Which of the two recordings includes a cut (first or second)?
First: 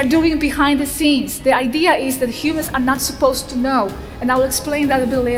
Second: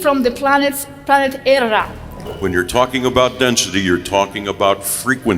second